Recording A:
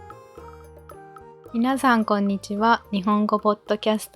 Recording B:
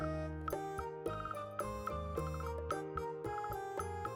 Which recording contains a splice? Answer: A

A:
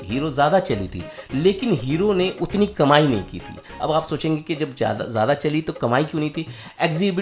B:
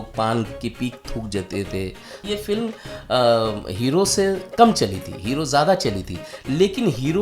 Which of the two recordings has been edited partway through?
B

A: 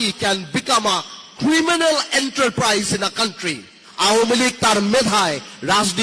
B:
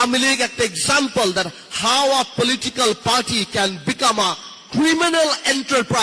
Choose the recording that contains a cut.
A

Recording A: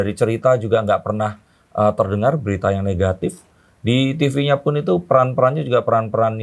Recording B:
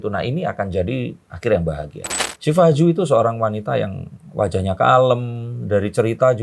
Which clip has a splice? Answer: B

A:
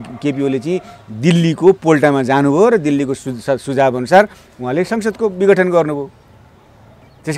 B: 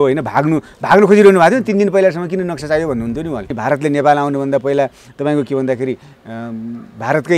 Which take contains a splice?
B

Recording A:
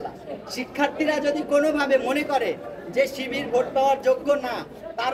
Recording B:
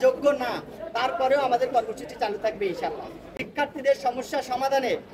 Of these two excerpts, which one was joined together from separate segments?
B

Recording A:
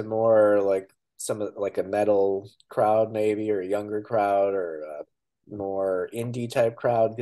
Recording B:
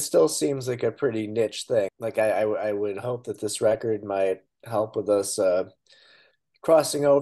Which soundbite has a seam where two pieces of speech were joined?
B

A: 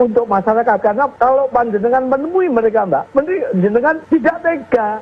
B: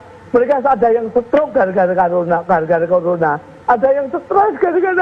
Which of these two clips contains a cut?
A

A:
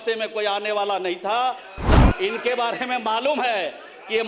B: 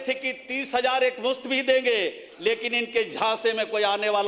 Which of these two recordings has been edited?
A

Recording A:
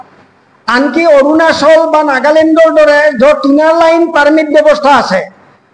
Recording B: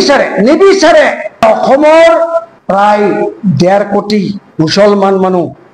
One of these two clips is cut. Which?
B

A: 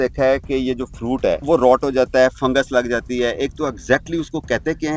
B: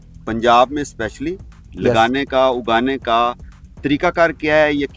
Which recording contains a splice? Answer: A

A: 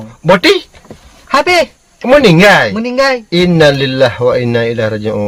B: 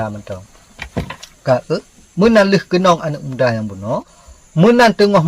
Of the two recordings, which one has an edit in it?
B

